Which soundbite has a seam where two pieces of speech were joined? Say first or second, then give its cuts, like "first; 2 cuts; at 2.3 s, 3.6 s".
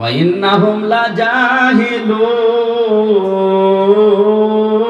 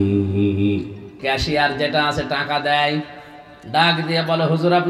second; 1 cut; at 1.1 s